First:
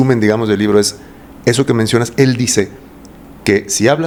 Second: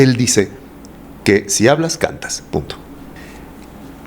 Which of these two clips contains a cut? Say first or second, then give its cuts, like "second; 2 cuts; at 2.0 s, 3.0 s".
second; 1 cut; at 3.1 s